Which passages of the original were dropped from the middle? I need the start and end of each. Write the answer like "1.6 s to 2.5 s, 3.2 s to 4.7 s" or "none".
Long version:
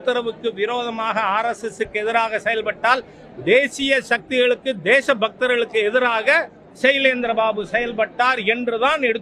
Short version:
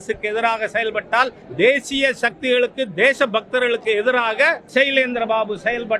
3.1 s to 3.3 s, 6.5 s to 6.7 s